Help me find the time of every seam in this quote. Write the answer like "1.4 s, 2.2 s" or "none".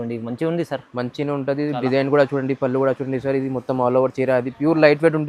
none